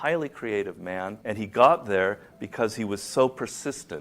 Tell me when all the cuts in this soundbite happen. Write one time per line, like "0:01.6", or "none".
0:01.2